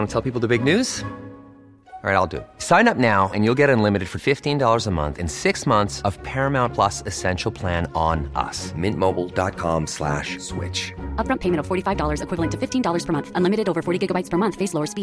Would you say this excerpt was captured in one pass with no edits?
yes; 0 cuts

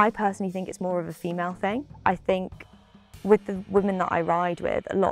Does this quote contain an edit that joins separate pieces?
no; 0 cuts

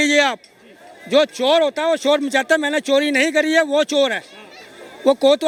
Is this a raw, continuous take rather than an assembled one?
yes; 0 cuts

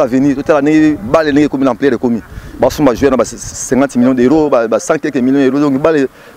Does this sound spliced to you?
no; 0 cuts

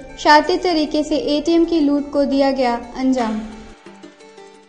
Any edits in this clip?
no; 0 cuts

